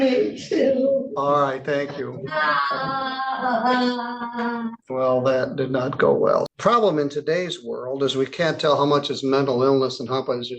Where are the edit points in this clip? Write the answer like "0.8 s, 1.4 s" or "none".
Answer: 4.8 s, 6.5 s

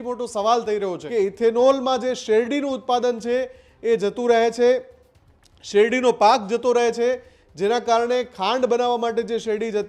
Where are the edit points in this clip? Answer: 1.0 s

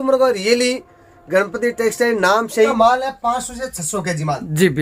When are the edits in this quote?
2.7 s

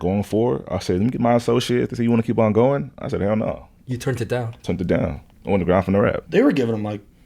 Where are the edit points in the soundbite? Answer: 6.2 s

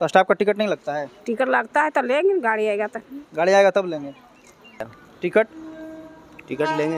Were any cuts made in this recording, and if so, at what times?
4.9 s

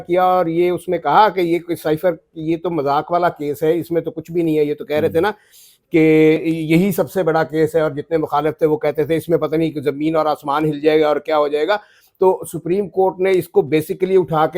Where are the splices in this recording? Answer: none

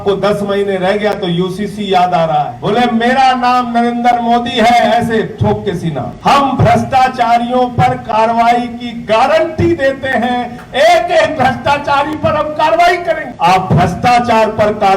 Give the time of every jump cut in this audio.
2.6 s, 6.1 s, 13.3 s

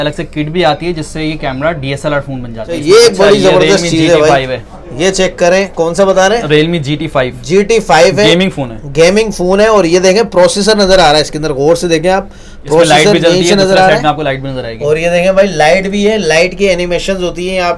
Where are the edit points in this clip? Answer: 2.8 s

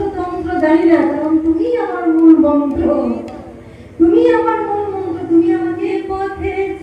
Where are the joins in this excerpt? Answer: 5.9 s

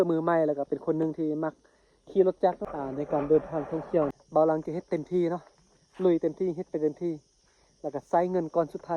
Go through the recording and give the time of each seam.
2.7 s, 4.2 s

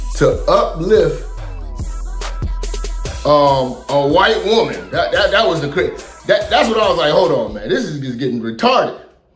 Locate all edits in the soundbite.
8.0 s

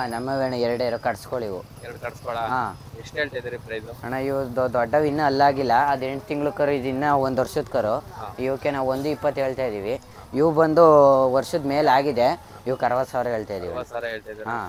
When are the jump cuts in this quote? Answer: none

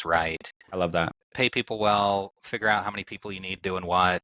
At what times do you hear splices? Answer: 1.2 s

